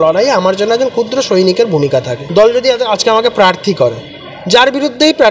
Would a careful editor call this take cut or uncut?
cut